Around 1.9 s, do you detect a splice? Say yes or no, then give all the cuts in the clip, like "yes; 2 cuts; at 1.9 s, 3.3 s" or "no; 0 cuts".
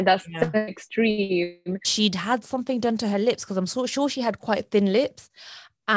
yes; 1 cut; at 1.9 s